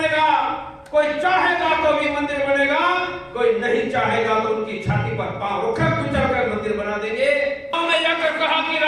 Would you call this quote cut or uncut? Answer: cut